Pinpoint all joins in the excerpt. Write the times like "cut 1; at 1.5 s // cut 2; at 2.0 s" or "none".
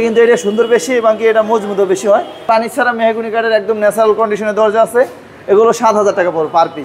cut 1; at 2.4 s